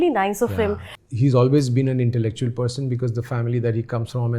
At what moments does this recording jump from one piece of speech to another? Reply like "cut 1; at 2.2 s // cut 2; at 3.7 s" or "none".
cut 1; at 0.9 s